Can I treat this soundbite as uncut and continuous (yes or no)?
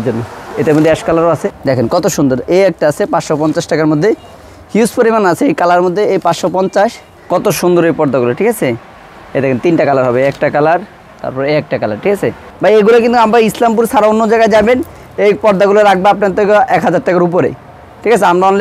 no